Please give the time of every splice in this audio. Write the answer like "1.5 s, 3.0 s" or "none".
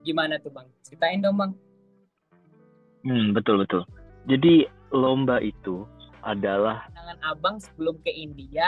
7.2 s